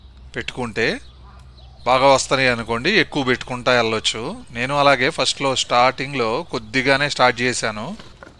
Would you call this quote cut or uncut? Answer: uncut